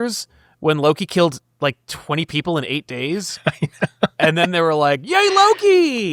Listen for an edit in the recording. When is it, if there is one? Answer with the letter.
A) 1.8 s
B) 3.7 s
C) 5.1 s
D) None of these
D